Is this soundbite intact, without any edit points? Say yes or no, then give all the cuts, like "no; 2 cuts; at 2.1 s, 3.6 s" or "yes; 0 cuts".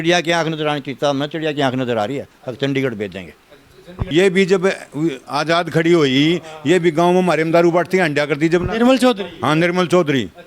no; 1 cut; at 3.8 s